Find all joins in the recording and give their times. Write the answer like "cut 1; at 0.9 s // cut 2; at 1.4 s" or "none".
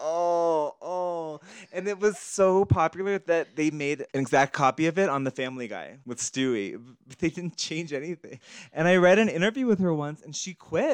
none